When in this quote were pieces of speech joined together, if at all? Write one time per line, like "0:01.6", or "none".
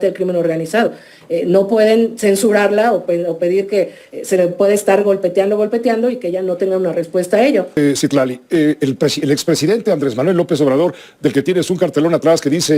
0:07.8